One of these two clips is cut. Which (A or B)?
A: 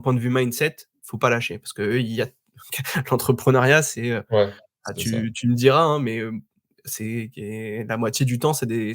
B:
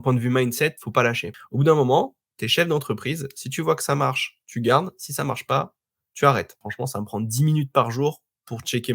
B